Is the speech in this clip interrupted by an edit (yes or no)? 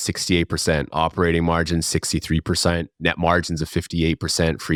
no